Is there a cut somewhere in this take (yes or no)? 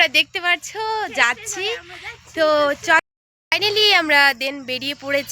yes